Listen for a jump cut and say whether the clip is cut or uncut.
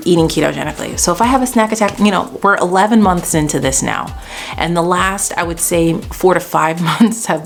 uncut